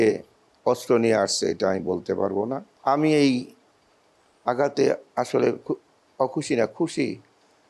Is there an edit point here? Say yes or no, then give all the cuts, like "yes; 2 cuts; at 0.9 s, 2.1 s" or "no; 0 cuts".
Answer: yes; 1 cut; at 2.7 s